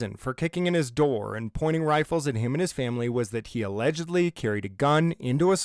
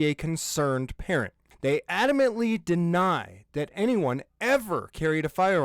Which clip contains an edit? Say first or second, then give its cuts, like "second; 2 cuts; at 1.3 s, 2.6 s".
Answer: second; 1 cut; at 1.4 s